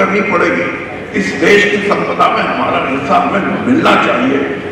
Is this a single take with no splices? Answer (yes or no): yes